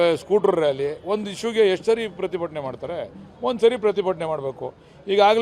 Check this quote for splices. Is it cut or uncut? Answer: uncut